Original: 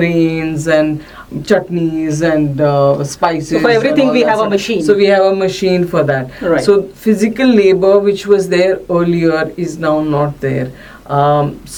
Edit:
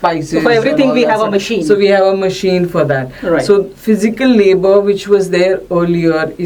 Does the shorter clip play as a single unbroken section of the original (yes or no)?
yes